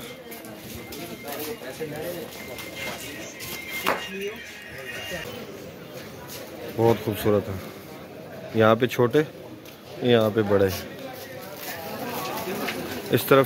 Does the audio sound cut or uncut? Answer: cut